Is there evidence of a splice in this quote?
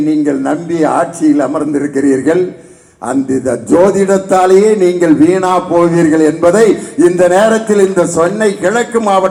no; 0 cuts

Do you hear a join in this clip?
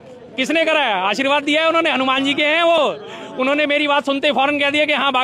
no; 0 cuts

